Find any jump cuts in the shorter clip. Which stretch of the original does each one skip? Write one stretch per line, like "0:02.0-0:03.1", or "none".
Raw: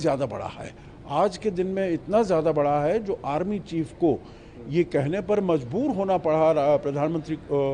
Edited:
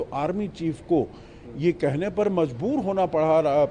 none

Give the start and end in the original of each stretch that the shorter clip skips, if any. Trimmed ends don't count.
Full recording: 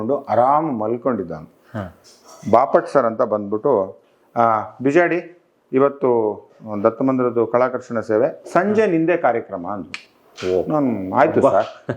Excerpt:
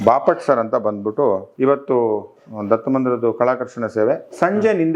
0:03.9-0:05.6

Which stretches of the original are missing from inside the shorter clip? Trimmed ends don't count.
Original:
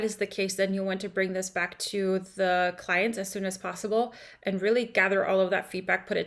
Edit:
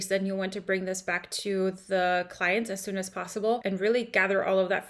0:04.1-0:04.4

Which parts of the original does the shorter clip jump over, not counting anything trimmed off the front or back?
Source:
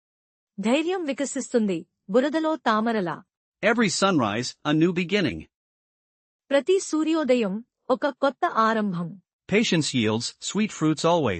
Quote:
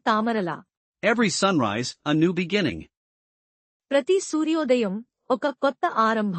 none

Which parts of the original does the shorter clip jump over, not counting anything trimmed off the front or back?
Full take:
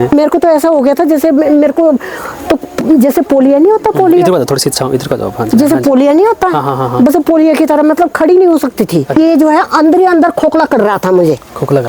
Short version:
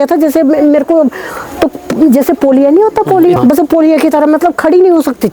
0:04.2-0:06.9

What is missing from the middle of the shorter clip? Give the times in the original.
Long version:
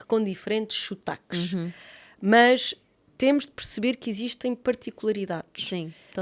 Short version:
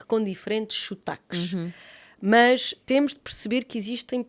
0:02.7-0:03.1

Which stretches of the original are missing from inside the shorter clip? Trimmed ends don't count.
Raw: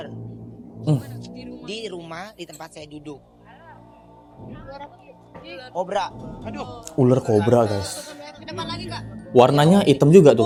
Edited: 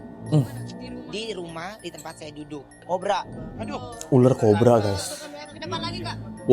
0:03.3-0:05.7

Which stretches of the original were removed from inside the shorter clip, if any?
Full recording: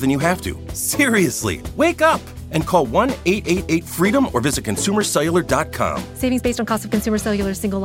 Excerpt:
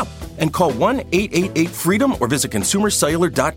none

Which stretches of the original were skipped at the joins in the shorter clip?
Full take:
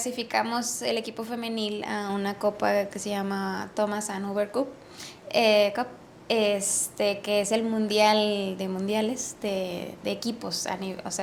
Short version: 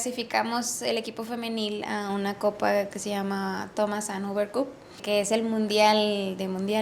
0:05.0-0:07.2

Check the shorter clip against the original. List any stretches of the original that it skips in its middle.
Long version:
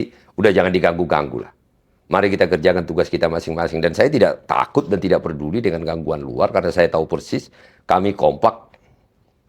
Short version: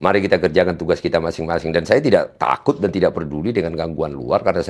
none

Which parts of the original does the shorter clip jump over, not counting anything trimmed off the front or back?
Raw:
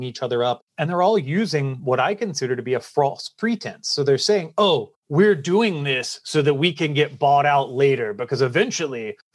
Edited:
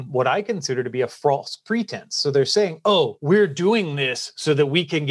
0:04.9-0:05.0

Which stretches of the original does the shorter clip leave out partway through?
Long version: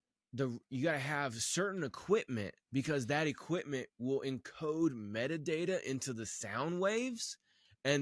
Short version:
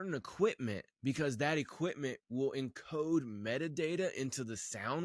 none

